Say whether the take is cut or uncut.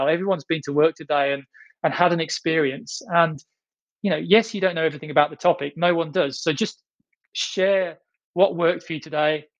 cut